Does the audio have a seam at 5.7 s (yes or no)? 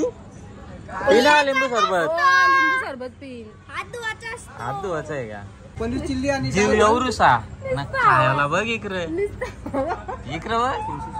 yes